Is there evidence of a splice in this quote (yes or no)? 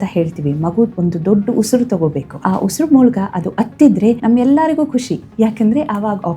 yes